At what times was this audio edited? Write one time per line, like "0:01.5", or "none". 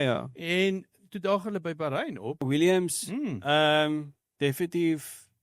0:02.4